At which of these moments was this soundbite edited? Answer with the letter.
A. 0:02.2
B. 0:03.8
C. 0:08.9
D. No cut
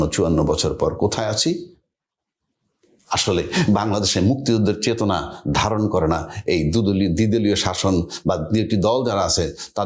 D